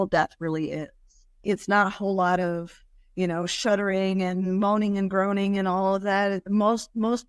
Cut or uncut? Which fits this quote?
uncut